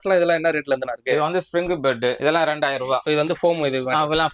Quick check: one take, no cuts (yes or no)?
no